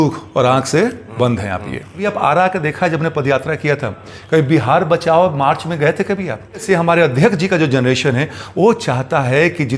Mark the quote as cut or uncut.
cut